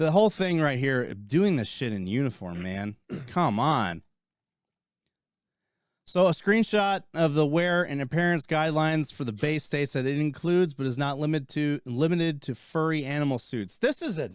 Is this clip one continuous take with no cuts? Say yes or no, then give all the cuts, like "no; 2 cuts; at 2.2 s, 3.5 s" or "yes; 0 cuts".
yes; 0 cuts